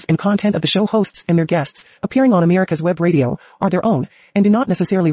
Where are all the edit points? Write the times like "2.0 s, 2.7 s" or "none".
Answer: none